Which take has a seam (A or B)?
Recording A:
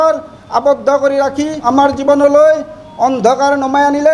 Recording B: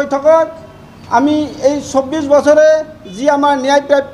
A